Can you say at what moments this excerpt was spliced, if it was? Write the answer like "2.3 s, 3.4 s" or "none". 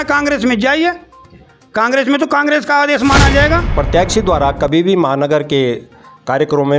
3.7 s